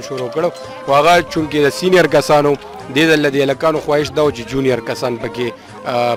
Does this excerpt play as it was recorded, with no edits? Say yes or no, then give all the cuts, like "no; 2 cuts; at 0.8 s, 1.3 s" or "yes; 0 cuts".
yes; 0 cuts